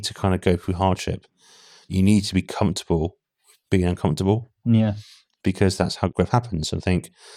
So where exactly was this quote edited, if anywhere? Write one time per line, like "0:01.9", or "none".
0:01.9
0:06.1